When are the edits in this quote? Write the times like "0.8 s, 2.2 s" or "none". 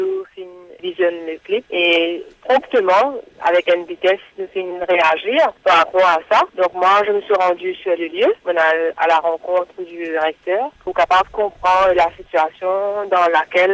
2.1 s